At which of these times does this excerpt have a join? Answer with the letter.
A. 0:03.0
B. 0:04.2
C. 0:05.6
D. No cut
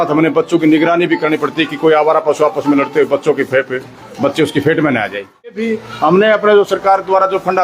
C